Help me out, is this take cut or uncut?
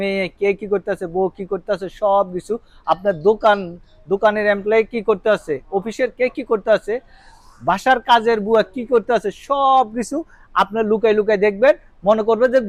uncut